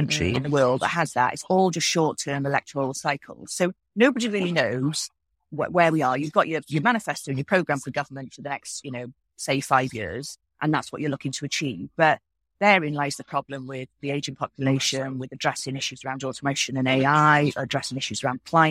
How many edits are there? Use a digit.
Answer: 0